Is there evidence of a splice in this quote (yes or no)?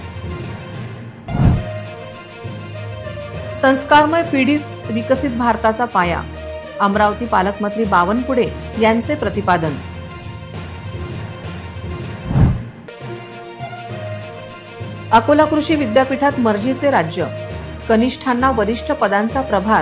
yes